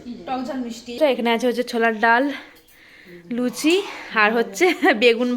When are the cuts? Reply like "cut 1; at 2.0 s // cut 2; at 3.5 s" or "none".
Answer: cut 1; at 1.0 s